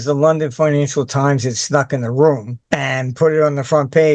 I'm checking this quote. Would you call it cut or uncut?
cut